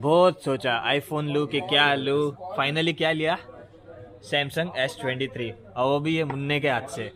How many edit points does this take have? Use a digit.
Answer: 0